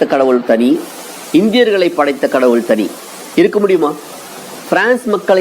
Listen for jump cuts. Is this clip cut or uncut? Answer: uncut